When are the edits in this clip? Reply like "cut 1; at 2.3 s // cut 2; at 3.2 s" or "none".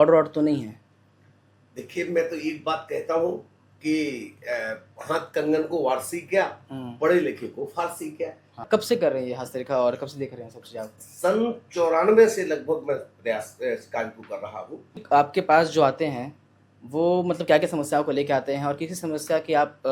cut 1; at 8.6 s // cut 2; at 15.0 s